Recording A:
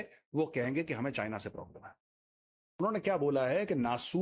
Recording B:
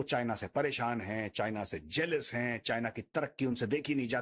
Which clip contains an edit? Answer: A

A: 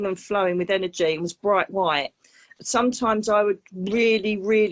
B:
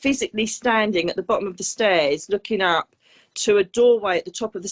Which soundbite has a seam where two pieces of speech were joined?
A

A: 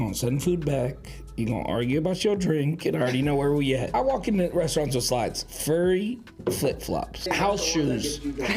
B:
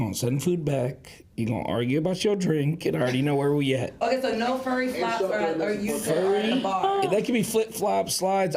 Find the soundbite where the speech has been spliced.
A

